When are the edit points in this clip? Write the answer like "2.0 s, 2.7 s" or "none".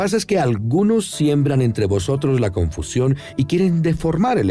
1.9 s